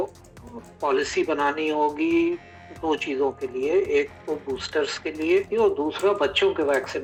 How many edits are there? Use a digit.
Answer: 0